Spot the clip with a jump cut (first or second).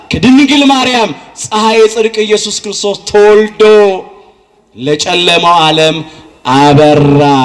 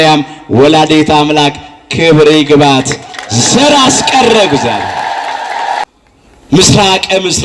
second